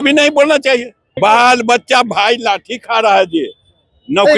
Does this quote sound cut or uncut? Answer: cut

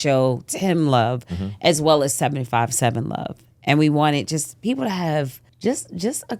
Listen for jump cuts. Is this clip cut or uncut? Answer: cut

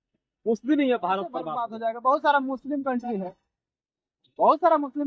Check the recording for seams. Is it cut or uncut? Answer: cut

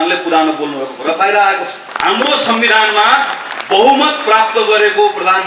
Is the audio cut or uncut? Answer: cut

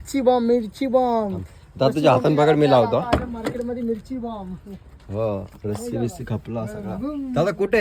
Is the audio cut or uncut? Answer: uncut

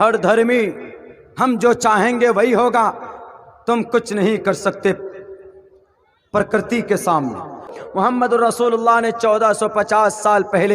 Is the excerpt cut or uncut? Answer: cut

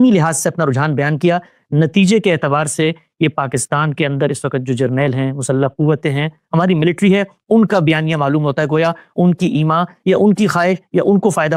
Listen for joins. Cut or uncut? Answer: uncut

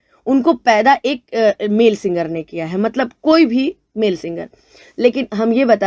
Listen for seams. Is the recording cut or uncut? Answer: uncut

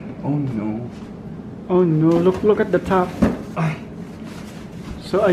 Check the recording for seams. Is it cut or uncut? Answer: uncut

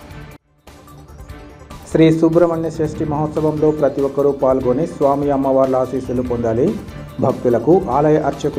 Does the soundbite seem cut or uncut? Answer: cut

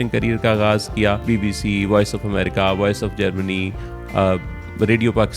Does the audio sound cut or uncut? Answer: cut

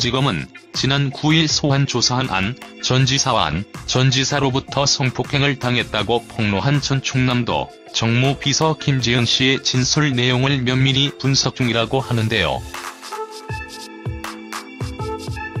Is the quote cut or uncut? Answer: uncut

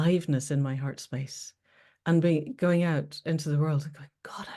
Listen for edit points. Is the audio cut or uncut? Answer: uncut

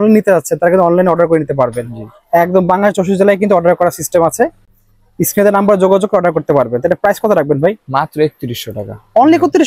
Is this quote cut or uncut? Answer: uncut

